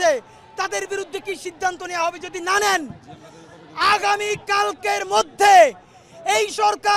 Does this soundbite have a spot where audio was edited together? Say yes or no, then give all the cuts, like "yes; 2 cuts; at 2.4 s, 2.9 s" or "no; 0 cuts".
no; 0 cuts